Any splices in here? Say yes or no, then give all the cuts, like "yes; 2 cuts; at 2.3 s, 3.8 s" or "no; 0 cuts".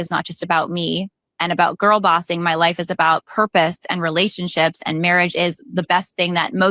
no; 0 cuts